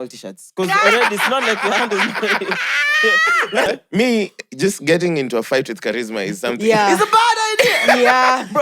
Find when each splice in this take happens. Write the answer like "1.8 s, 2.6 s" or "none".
3.7 s